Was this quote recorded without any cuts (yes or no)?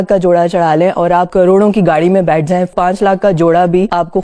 no